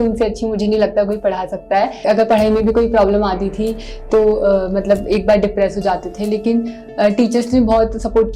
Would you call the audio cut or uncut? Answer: cut